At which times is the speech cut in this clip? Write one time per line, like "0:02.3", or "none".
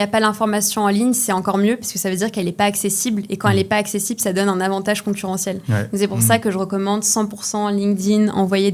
none